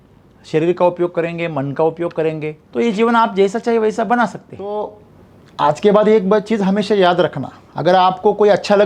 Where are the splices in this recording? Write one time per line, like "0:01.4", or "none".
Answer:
0:02.6
0:04.7